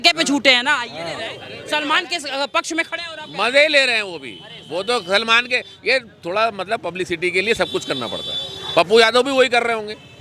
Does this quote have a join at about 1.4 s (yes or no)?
yes